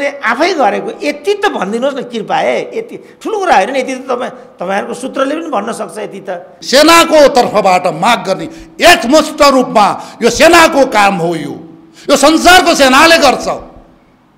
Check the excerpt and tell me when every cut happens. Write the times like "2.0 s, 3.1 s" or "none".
6.5 s